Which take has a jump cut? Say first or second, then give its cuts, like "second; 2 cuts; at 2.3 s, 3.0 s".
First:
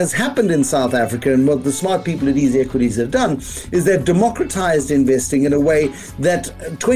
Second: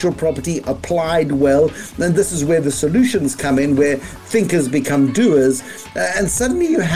first; 1 cut; at 1.6 s